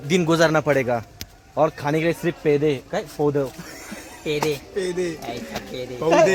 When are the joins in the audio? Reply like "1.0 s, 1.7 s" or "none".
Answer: none